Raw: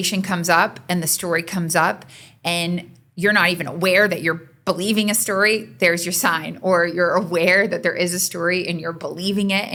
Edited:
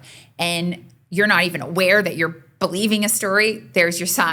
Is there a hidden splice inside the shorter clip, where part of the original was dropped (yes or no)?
no